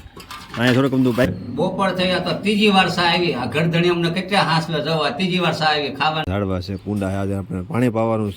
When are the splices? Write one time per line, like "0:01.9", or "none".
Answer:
0:01.3
0:06.3